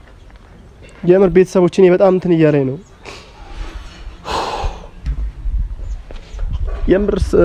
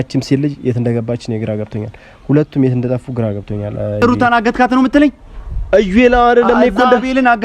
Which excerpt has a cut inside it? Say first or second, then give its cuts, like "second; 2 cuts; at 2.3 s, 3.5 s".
second; 1 cut; at 4.2 s